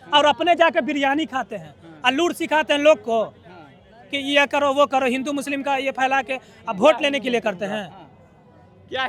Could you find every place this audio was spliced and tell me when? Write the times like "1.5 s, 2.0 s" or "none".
none